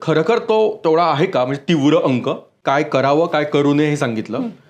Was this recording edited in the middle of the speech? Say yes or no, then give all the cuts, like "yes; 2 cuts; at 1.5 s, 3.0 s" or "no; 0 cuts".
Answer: yes; 1 cut; at 2.6 s